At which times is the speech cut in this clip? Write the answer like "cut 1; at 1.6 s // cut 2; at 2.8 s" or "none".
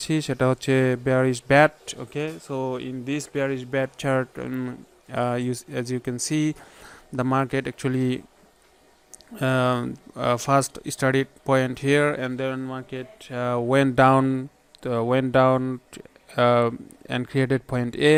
none